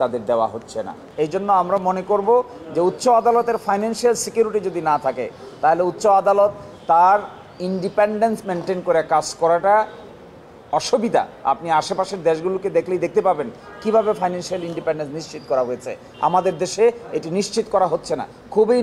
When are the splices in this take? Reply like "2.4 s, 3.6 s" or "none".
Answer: 1.0 s

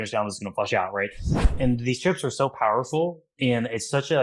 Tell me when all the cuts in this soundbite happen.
1.5 s

